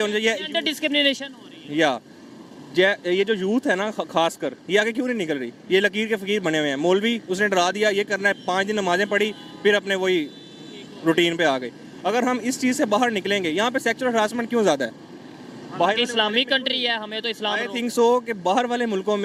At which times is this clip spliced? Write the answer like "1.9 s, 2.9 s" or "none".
none